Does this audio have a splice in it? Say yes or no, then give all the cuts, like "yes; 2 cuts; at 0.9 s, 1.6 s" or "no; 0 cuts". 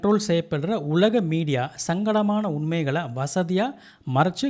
no; 0 cuts